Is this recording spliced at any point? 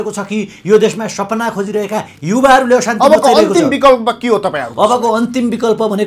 no; 0 cuts

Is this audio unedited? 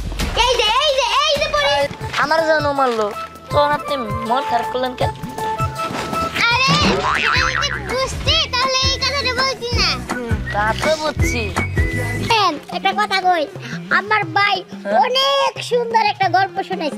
no; 2 cuts; at 1.9 s, 12.3 s

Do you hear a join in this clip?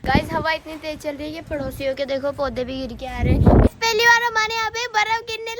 yes; 1 cut; at 3.7 s

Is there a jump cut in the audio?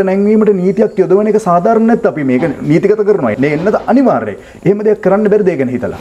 no; 0 cuts

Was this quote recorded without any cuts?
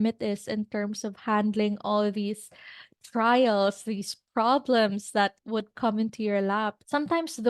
no; 1 cut; at 5.4 s

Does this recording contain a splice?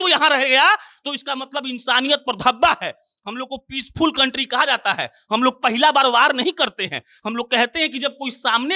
no; 0 cuts

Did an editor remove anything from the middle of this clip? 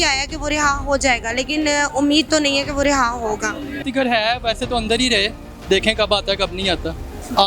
yes; 1 cut; at 3.8 s

